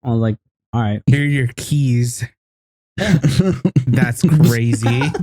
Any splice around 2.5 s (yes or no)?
no